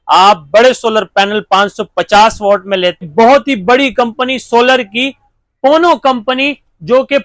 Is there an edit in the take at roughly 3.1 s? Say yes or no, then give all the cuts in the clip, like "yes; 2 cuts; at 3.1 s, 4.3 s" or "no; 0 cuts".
yes; 1 cut; at 3.1 s